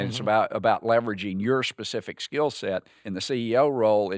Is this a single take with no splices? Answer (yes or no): no